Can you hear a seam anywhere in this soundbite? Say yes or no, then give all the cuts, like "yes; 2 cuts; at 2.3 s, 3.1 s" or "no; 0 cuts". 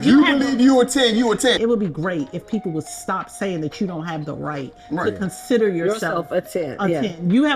yes; 1 cut; at 1.6 s